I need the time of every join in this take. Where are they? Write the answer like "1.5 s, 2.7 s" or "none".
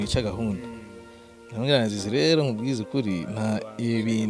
none